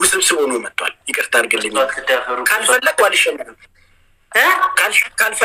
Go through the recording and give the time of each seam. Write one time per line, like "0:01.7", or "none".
none